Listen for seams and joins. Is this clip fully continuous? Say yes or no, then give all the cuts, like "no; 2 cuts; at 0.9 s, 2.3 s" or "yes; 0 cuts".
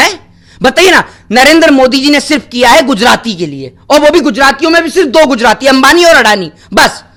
yes; 0 cuts